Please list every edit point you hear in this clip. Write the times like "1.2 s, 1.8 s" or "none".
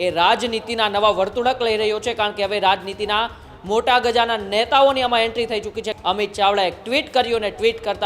5.9 s

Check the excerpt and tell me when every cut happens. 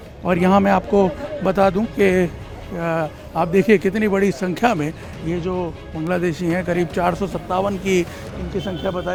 none

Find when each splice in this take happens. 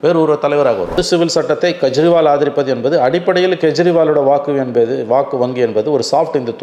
0.9 s

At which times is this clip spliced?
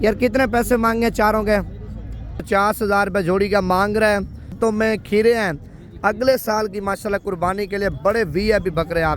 2.4 s, 4.5 s

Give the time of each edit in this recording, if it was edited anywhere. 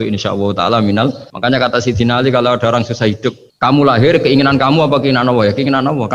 1.3 s, 3.5 s

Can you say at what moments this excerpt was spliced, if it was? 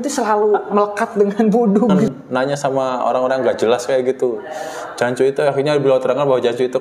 2.1 s

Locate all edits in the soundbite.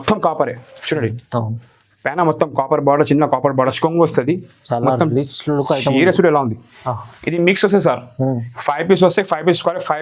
3.8 s

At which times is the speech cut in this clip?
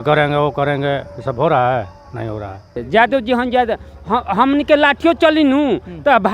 2.8 s

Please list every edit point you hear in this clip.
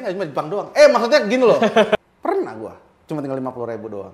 1.9 s

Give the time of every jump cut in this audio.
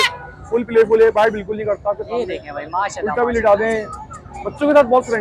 none

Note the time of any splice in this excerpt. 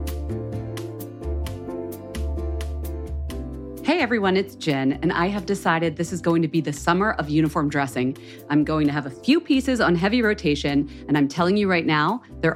3.6 s

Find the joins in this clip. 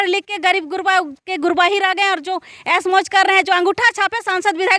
none

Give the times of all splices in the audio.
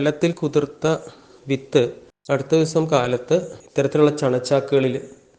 2.1 s, 3.6 s

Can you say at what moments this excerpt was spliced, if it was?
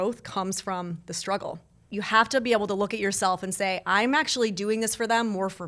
1.8 s

